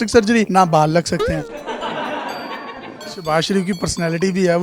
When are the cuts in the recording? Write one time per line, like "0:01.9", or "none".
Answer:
0:01.5
0:03.1